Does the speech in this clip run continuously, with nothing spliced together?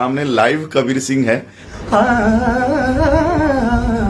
no; 1 cut; at 1.6 s

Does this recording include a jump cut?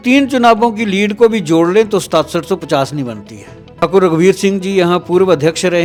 no; 0 cuts

